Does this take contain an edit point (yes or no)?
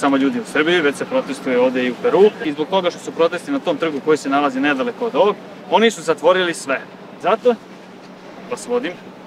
no